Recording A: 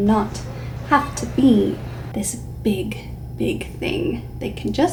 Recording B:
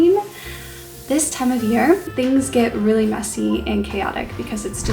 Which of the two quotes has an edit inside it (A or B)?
B